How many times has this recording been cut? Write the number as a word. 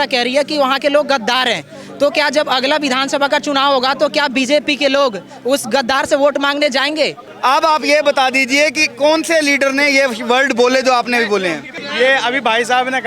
two